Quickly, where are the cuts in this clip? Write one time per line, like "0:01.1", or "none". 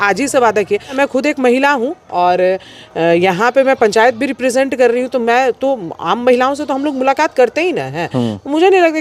0:00.9